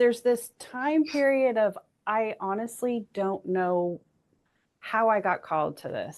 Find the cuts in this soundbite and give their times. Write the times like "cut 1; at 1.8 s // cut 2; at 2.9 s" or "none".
none